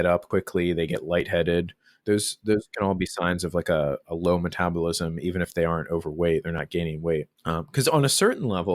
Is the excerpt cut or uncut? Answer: cut